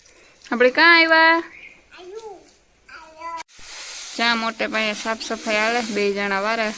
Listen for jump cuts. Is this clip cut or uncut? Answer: cut